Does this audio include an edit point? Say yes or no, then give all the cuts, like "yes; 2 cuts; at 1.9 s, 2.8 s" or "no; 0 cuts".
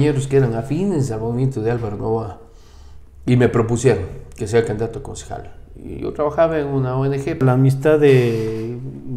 yes; 1 cut; at 7.4 s